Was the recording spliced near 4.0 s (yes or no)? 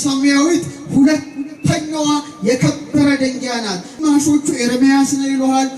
yes